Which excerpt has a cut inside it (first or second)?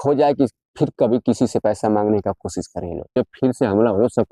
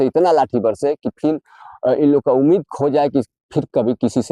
first